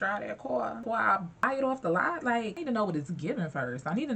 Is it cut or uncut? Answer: cut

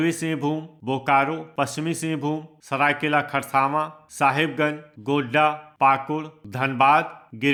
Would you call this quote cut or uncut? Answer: uncut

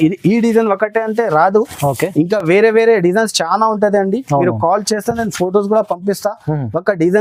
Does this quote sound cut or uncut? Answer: uncut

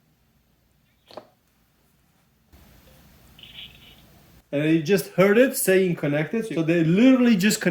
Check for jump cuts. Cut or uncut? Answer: cut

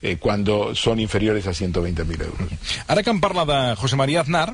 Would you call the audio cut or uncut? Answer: cut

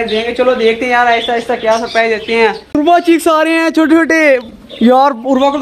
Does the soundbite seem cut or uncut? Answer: cut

